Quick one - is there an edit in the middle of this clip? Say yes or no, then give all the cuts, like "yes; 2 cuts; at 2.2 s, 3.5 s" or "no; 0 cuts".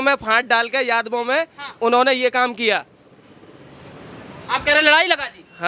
no; 0 cuts